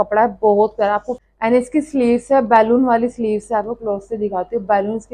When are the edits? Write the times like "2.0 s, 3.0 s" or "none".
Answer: 1.2 s